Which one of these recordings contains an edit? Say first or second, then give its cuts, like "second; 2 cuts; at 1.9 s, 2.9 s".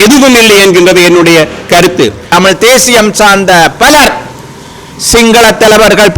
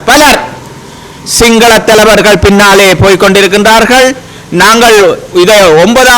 first; 1 cut; at 2.3 s